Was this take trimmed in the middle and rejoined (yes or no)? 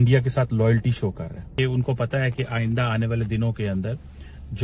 yes